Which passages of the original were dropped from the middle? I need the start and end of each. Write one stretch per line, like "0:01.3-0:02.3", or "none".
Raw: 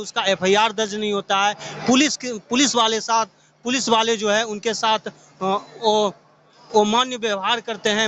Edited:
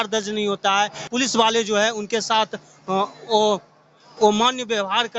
0:01.7-0:03.5